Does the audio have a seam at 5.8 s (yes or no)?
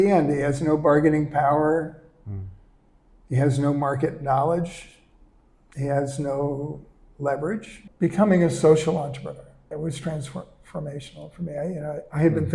no